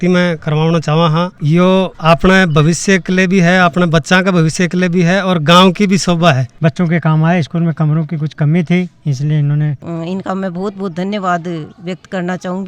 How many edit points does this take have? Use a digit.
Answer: 3